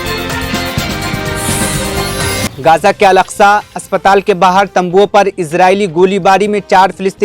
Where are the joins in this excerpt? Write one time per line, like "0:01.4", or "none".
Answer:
0:02.5